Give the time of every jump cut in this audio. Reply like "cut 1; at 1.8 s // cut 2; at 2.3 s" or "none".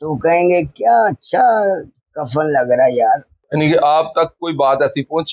cut 1; at 3.4 s